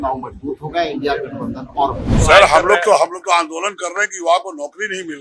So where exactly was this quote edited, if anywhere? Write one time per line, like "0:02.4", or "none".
0:02.1

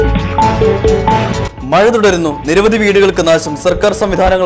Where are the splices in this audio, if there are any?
0:01.1

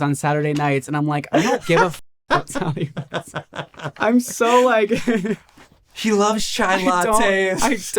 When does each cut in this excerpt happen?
0:03.9

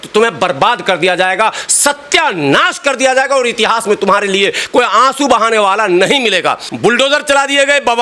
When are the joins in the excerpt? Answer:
0:06.7

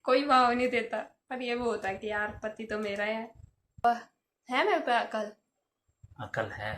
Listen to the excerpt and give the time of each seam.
0:03.8

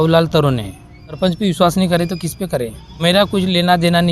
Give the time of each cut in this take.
0:01.2
0:03.0

